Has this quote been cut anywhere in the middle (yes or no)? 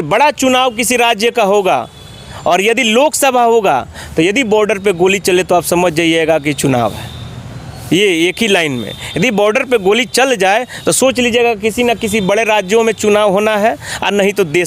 no